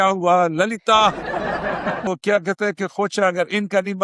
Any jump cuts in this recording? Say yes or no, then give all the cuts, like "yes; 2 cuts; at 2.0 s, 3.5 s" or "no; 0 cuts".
yes; 1 cut; at 2.1 s